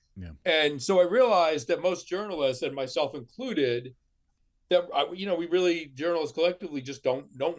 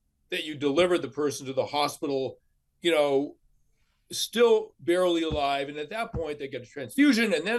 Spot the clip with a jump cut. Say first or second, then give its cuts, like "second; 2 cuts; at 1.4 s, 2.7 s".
first; 1 cut; at 4.2 s